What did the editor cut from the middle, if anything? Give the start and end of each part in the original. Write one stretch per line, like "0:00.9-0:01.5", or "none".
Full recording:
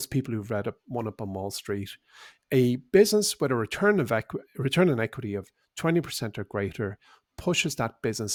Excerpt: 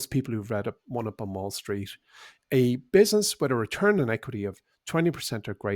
0:04.0-0:04.9